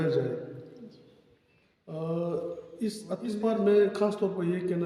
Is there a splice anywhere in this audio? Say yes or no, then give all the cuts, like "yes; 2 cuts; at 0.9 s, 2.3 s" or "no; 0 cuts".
yes; 1 cut; at 3.4 s